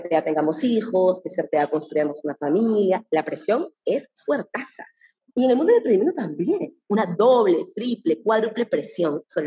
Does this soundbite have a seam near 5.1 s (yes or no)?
yes